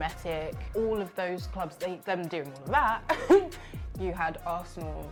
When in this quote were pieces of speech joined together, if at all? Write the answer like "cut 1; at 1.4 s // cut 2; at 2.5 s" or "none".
none